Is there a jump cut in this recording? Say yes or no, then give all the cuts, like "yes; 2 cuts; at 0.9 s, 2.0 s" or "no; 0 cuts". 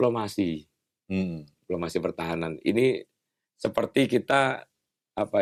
no; 0 cuts